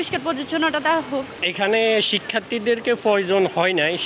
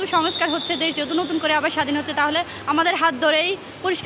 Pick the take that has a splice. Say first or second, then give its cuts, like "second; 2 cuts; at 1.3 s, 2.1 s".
first; 1 cut; at 1.4 s